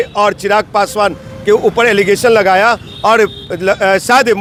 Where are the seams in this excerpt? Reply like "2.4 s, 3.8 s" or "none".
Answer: none